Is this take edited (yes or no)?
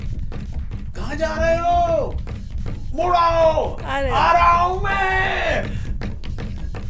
no